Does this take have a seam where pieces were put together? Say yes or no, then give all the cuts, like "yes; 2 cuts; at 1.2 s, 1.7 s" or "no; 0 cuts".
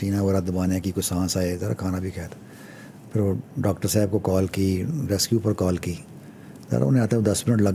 no; 0 cuts